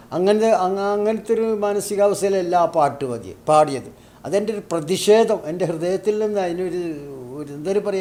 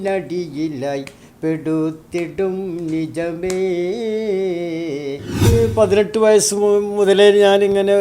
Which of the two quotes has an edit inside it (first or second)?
second